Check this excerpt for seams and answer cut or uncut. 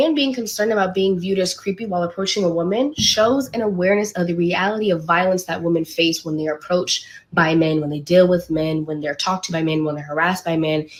uncut